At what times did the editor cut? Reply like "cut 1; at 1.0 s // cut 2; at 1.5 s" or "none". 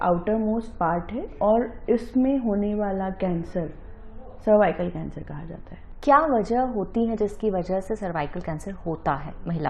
none